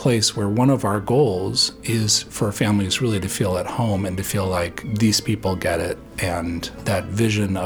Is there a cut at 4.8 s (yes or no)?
yes